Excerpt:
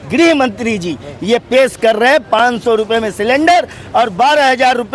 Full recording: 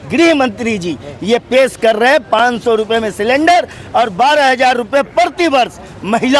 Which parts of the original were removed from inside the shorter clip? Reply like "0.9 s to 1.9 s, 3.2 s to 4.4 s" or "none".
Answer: none